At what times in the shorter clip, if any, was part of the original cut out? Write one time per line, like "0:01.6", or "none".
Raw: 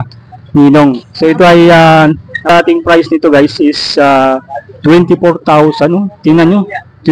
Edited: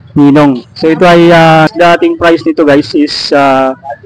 0:01.7